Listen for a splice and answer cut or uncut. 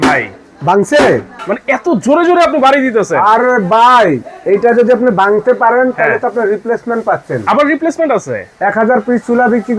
uncut